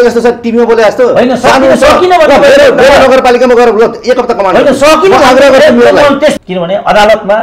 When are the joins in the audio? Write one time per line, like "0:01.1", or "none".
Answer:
0:06.4